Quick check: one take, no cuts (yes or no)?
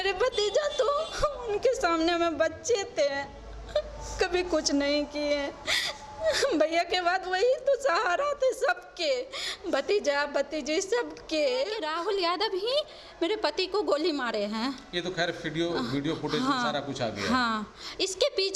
no